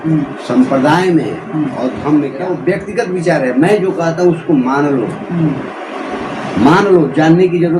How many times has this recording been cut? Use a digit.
1